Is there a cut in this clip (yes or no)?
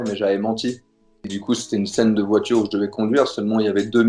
yes